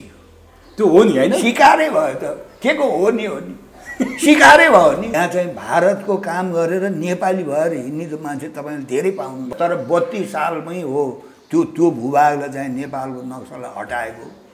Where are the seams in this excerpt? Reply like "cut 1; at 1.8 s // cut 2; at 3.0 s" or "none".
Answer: cut 1; at 5.1 s // cut 2; at 9.5 s

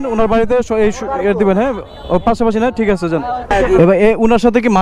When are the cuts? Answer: cut 1; at 3.5 s

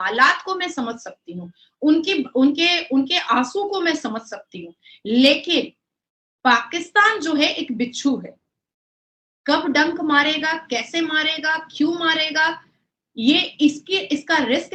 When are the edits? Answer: none

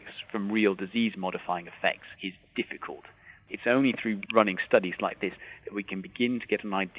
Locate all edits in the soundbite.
cut 1; at 2.1 s // cut 2; at 3.3 s // cut 3; at 4.2 s // cut 4; at 5.4 s

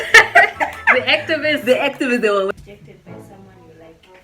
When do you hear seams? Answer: cut 1; at 2.5 s

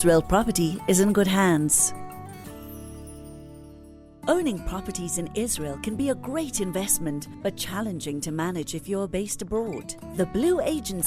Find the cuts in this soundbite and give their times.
cut 1; at 1.7 s // cut 2; at 4.1 s

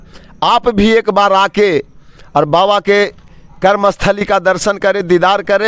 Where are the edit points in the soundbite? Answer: none

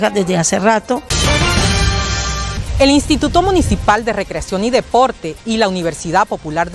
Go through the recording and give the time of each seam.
cut 1; at 1.1 s // cut 2; at 2.5 s

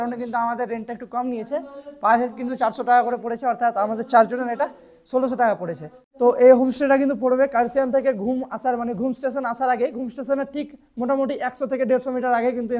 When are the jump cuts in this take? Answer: none

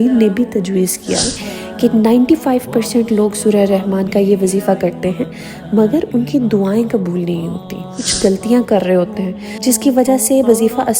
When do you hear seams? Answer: cut 1; at 1.4 s // cut 2; at 8.0 s

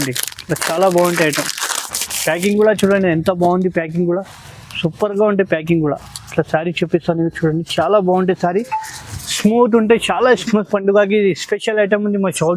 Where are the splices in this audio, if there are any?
cut 1; at 10.4 s

